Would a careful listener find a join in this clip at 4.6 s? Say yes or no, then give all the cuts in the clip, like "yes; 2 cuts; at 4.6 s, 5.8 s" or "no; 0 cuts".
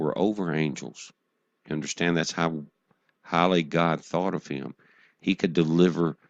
yes; 1 cut; at 4.6 s